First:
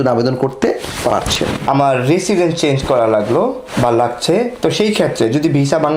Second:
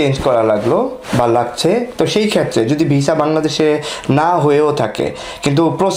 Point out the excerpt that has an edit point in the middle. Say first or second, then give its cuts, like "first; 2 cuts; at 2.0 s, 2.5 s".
first; 1 cut; at 1.6 s